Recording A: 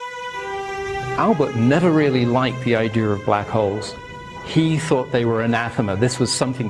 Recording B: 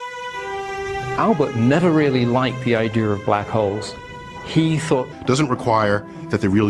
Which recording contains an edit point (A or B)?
A